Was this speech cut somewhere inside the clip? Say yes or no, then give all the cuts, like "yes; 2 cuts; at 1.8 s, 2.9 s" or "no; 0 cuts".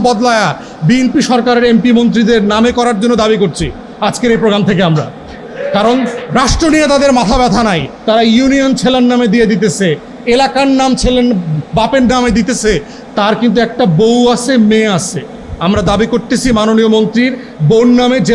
no; 0 cuts